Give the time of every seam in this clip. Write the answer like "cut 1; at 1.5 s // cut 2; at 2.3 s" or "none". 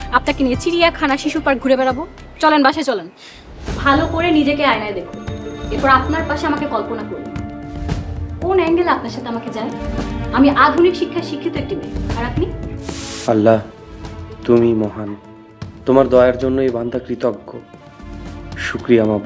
cut 1; at 13.1 s

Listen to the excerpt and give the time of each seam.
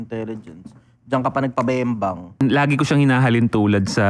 cut 1; at 2.4 s

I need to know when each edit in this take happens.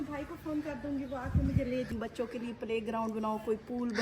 cut 1; at 1.9 s

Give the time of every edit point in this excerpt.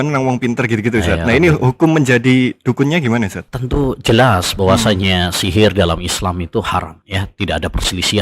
cut 1; at 3.5 s // cut 2; at 7.0 s

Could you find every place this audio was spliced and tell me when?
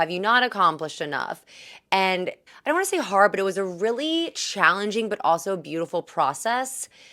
cut 1; at 2.4 s

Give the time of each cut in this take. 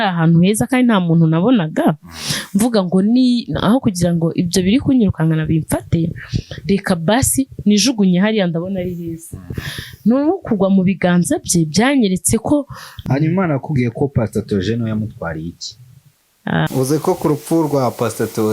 cut 1; at 13.0 s // cut 2; at 16.7 s

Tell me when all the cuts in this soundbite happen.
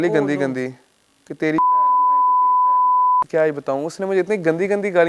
cut 1; at 3.3 s

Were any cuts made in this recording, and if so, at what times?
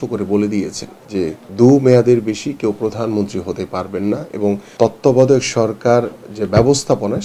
cut 1; at 1.3 s // cut 2; at 4.7 s

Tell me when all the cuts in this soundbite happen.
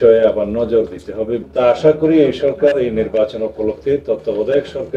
cut 1; at 1.4 s

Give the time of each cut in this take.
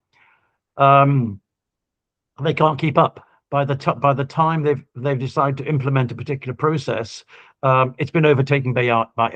none

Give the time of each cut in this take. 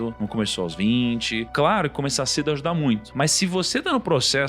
cut 1; at 1.5 s // cut 2; at 3.1 s

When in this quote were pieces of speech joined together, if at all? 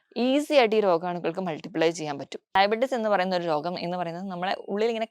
cut 1; at 2.6 s

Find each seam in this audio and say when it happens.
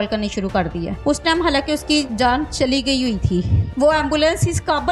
cut 1; at 0.9 s // cut 2; at 2.1 s // cut 3; at 3.6 s

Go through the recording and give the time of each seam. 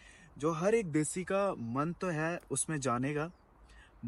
none

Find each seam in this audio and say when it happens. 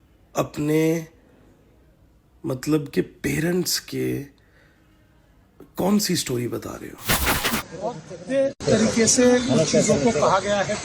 cut 1; at 7.3 s

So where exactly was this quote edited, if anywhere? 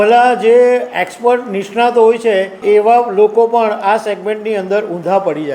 cut 1; at 2.6 s

